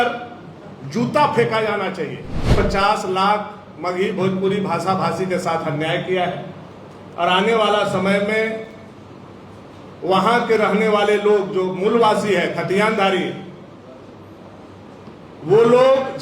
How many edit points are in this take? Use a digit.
1